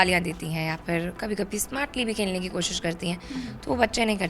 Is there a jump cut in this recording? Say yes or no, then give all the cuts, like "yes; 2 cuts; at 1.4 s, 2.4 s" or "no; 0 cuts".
no; 0 cuts